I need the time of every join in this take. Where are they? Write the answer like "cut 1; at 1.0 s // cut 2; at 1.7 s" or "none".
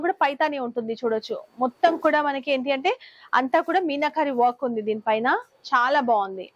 none